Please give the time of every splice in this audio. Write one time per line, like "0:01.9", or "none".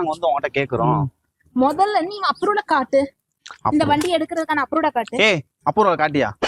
none